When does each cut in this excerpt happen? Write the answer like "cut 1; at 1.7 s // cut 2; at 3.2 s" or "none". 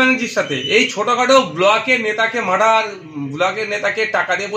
none